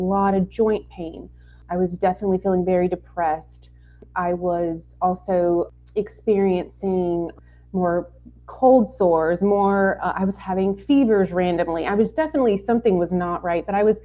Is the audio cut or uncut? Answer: cut